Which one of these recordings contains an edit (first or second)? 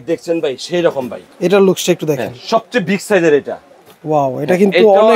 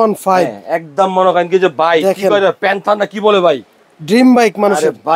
first